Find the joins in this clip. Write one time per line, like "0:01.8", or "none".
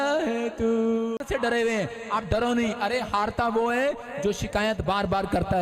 0:01.2